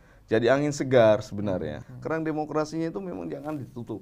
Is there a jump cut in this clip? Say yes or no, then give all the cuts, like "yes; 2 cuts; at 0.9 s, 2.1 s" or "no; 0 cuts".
yes; 1 cut; at 1.9 s